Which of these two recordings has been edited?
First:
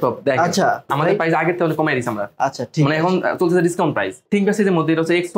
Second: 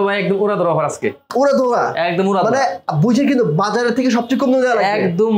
first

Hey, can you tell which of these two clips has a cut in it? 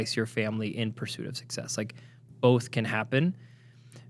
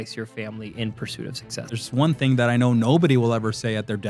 second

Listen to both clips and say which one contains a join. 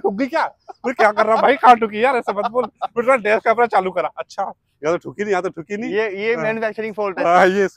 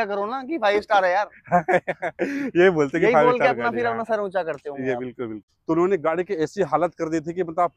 second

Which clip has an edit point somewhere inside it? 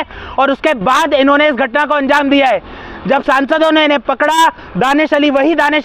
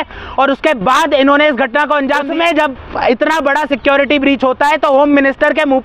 second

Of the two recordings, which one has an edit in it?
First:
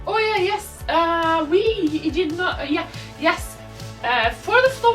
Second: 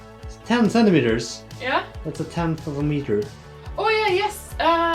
second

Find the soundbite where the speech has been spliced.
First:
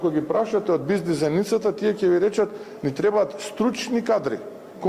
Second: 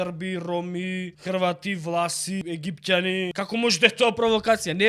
second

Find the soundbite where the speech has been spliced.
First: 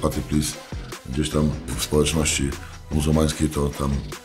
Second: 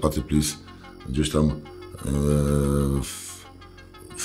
first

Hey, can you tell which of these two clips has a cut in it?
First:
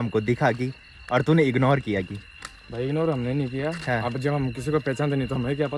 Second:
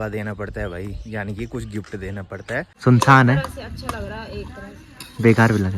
second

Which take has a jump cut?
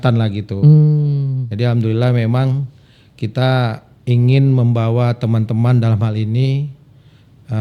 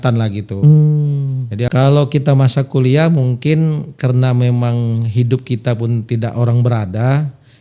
second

